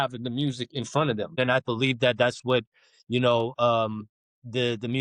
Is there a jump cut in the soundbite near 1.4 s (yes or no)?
yes